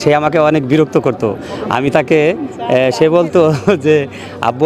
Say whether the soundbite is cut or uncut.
uncut